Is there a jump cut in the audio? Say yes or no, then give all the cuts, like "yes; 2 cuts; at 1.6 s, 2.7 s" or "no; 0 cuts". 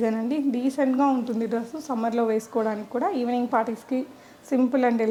no; 0 cuts